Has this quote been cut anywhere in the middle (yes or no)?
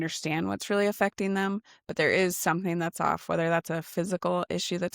no